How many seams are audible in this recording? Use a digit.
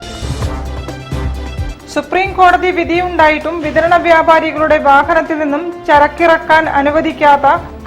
1